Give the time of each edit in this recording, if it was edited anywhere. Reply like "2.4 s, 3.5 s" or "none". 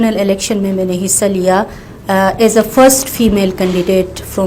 none